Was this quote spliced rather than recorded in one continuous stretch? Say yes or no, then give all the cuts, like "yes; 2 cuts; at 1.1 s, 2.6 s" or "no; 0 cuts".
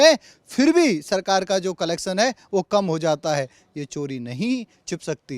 no; 0 cuts